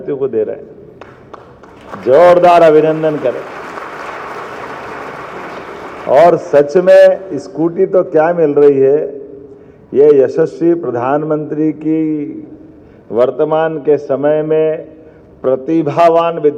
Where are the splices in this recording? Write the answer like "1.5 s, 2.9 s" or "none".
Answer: none